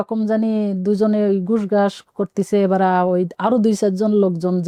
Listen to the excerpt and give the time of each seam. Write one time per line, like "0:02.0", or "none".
none